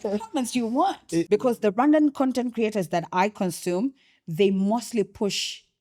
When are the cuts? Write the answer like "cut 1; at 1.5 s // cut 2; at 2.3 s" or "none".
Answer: cut 1; at 1.3 s